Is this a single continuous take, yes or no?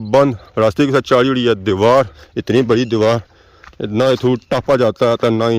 no